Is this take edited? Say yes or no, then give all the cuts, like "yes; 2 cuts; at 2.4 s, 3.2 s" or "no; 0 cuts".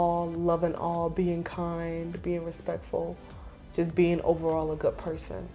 no; 0 cuts